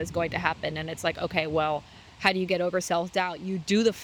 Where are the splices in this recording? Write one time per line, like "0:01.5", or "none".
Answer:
none

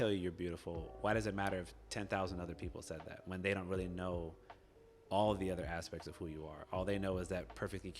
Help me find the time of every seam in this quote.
none

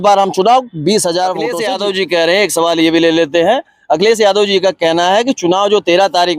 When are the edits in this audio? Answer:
0:01.5

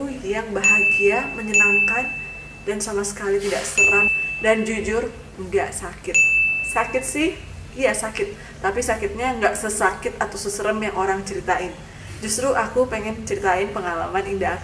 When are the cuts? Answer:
none

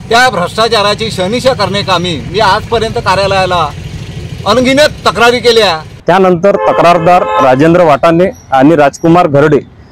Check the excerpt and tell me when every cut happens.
0:05.9

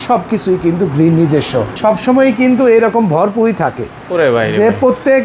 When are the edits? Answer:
0:01.7

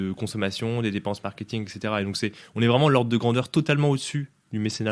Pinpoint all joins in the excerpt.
none

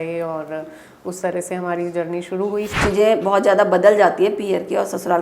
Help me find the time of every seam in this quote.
0:02.7

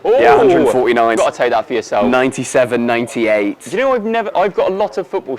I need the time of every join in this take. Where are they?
0:01.2

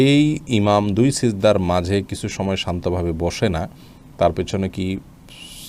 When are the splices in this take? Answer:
none

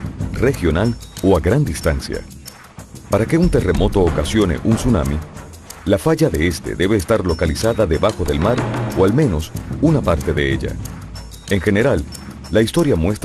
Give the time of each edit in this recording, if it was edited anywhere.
none

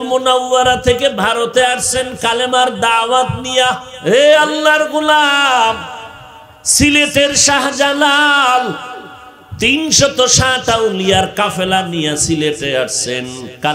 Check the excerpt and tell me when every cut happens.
0:03.9

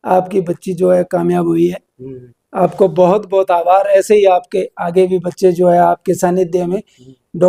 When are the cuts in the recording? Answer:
none

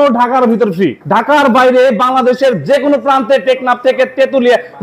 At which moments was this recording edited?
0:01.2

